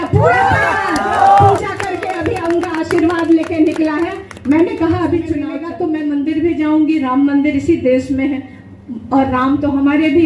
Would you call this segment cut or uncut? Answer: cut